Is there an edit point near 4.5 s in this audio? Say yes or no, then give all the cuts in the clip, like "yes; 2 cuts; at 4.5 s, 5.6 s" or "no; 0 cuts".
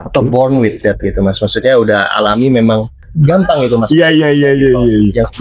no; 1 cut; at 3.0 s